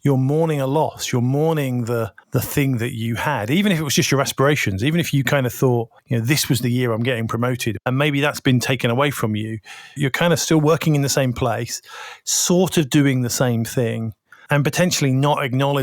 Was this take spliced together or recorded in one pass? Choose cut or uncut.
cut